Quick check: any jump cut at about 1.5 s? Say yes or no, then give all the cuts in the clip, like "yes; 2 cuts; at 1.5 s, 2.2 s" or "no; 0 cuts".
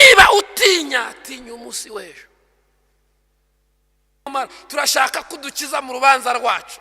no; 1 cut; at 4.3 s